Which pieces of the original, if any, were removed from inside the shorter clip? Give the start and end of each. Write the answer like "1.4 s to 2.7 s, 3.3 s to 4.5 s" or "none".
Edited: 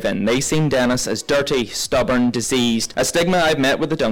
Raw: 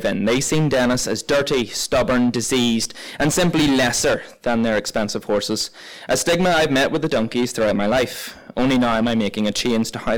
2.9 s to 6.0 s